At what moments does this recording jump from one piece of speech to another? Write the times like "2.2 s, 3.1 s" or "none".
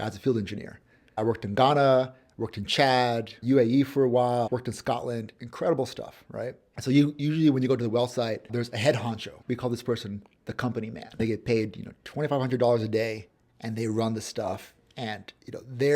1.2 s, 3.3 s, 4.5 s, 6.7 s, 8.5 s, 9.3 s, 11.2 s